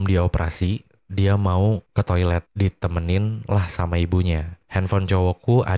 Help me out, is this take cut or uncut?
cut